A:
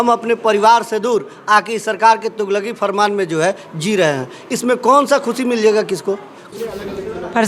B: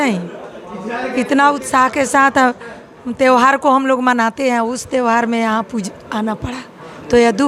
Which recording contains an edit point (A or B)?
A